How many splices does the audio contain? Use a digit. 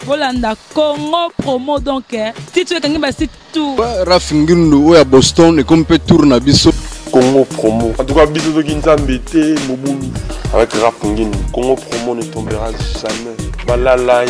2